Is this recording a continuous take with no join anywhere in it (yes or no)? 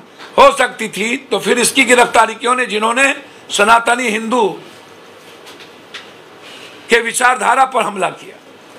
yes